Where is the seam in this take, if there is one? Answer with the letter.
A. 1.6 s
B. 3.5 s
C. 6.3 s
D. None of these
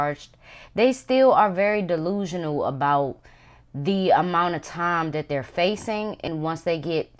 C